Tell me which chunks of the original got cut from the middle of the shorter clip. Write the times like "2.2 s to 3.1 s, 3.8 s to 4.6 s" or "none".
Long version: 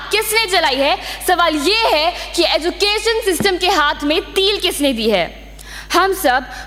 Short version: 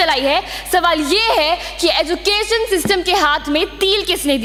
none